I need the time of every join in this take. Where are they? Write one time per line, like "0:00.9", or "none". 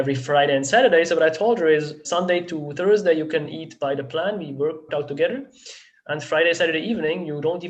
0:02.0
0:03.5
0:04.9

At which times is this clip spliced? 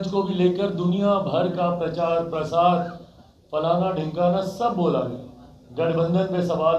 none

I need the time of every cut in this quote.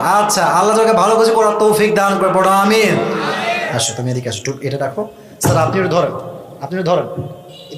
0:03.6

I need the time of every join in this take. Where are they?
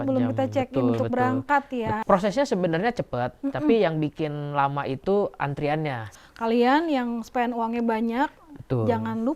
0:02.0
0:06.1

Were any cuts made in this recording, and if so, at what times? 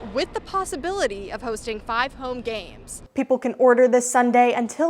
0:03.0

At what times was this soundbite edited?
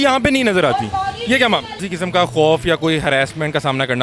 0:01.8

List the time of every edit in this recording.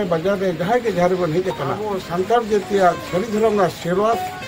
0:02.0

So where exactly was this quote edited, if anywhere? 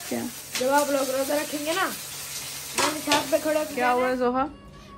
0:03.7

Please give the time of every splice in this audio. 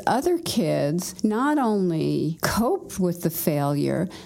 0:01.1
0:02.4

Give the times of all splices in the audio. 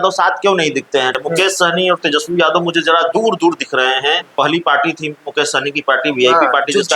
0:01.1
0:04.3

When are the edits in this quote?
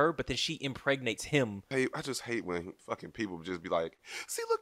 0:01.7
0:02.8

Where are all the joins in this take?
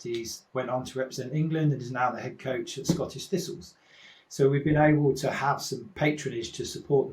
0:05.8

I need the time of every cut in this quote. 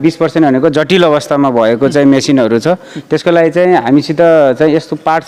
none

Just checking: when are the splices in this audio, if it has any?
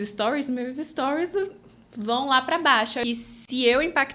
0:03.0

